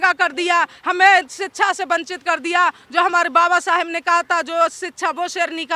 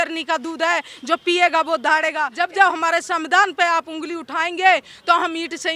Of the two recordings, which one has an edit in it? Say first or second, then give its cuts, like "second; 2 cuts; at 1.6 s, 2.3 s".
second; 1 cut; at 2.2 s